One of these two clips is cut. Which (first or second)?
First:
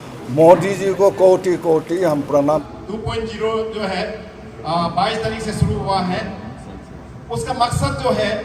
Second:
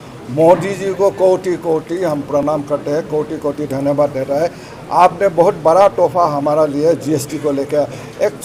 first